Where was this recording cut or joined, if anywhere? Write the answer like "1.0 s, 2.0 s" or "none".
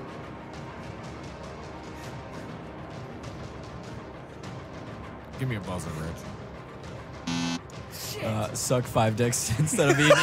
none